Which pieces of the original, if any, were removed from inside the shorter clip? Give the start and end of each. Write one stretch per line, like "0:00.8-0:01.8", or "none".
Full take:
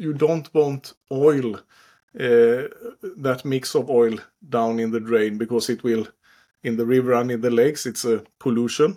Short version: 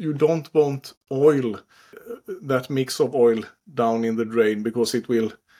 0:02.0-0:02.8